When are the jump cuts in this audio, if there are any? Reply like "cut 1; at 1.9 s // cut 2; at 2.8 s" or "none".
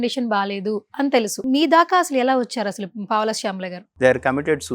cut 1; at 1.4 s // cut 2; at 3.8 s